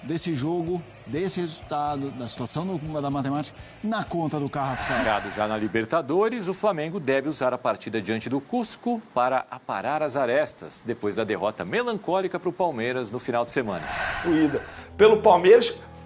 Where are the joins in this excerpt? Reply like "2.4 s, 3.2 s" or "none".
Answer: 5.0 s, 14.2 s

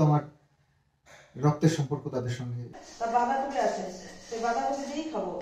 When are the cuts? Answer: 2.8 s

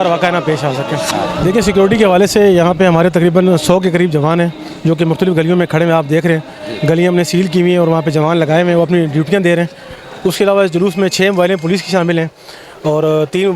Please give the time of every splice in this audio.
1.4 s

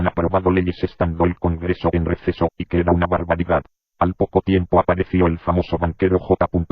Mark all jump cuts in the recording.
3.7 s

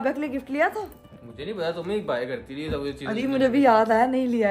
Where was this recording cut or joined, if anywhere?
none

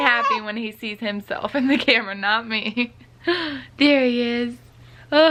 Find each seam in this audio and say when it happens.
none

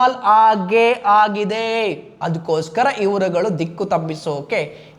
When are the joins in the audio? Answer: 2.1 s

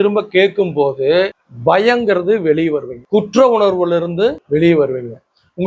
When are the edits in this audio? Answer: 1.4 s, 2.9 s, 4.4 s

